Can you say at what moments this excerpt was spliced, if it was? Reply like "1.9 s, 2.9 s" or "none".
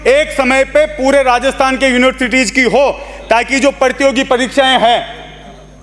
none